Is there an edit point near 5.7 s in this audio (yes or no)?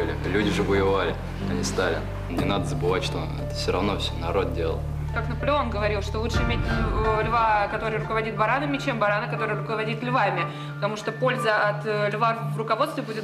no